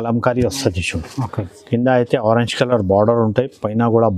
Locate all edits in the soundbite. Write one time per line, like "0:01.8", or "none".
none